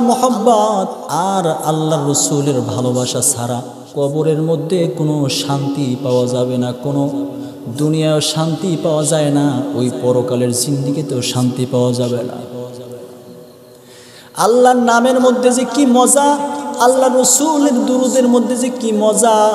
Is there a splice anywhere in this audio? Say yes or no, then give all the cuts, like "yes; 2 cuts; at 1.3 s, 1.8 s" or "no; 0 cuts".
yes; 2 cuts; at 1.0 s, 3.8 s